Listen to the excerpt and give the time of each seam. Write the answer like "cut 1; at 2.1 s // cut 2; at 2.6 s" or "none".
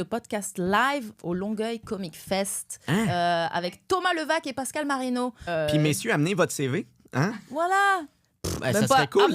cut 1; at 5.4 s